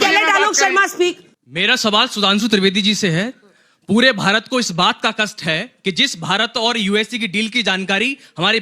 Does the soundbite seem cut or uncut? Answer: cut